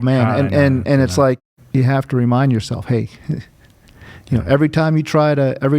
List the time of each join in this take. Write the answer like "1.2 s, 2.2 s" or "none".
1.4 s